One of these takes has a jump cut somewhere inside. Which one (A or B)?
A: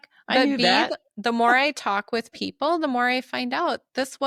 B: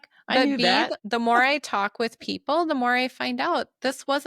B